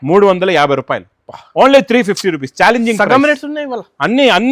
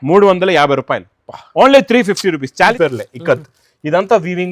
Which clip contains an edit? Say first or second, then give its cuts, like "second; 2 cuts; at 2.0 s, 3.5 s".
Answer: second; 1 cut; at 2.7 s